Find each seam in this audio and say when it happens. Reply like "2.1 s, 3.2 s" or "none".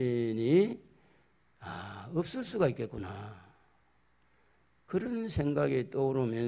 none